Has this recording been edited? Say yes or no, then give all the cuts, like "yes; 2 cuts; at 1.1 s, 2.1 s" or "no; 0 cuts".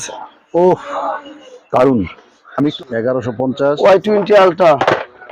yes; 1 cut; at 2.7 s